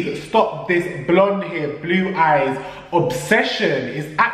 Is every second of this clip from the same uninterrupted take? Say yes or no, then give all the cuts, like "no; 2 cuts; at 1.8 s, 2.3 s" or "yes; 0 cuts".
yes; 0 cuts